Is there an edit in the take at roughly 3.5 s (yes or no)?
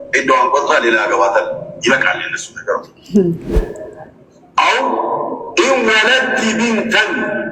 yes